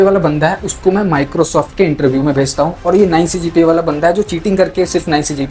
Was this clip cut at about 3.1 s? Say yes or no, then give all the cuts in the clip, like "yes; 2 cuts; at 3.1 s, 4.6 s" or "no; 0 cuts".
no; 0 cuts